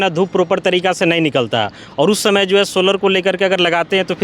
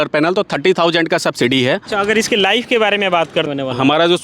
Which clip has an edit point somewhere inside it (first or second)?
second